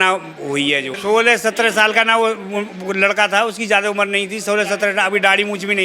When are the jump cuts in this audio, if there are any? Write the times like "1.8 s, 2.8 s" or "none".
0.9 s